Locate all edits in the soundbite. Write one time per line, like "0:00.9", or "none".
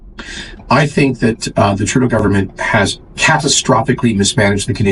none